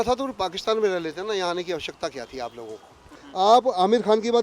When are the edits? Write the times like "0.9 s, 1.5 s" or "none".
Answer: 3.2 s